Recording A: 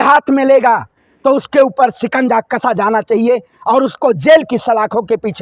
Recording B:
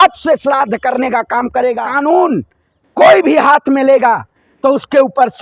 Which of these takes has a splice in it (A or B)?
B